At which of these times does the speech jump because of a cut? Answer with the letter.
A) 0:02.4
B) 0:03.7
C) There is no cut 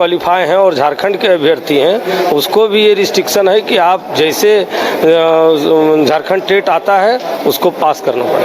C